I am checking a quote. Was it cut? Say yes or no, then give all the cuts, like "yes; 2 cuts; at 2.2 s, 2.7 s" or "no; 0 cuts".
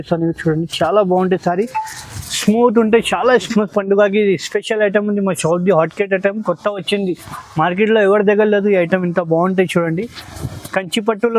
yes; 1 cut; at 3.4 s